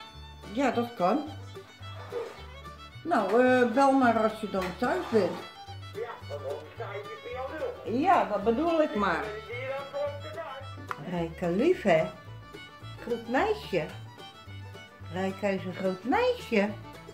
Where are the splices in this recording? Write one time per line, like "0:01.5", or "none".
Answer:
0:10.7

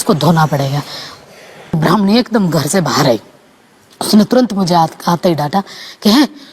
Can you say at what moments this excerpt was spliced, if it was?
0:01.8

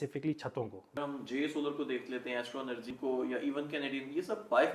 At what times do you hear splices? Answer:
0:01.0
0:02.9

